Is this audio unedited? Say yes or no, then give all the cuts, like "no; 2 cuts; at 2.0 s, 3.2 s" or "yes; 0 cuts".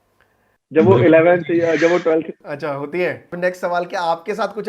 no; 1 cut; at 3.3 s